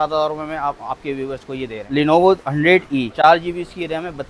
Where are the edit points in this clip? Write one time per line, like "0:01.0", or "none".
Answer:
0:01.9
0:03.1